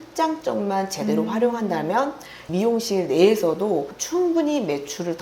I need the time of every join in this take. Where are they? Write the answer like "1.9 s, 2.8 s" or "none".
2.5 s, 4.0 s

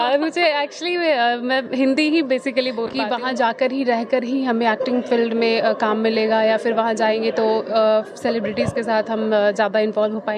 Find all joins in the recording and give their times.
2.9 s

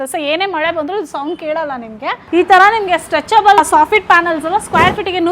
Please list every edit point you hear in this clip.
2.1 s, 3.6 s

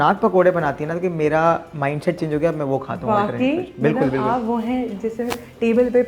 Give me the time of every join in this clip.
none

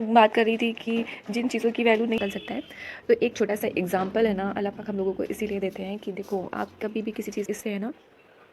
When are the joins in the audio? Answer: 2.2 s, 7.5 s

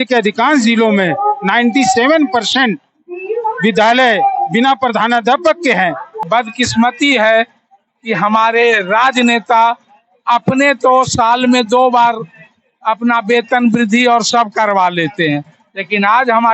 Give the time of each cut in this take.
6.2 s

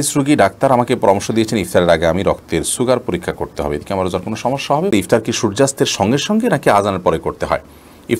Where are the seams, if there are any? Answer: 4.9 s

